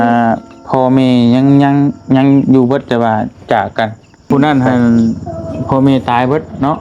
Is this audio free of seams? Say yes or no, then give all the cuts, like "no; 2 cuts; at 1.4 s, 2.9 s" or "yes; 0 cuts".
no; 1 cut; at 4.3 s